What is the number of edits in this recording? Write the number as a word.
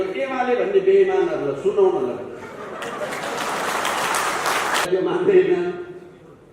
one